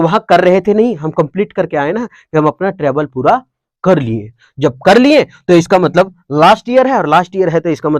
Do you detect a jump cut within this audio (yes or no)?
no